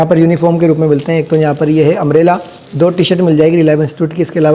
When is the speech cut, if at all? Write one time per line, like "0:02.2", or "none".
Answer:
none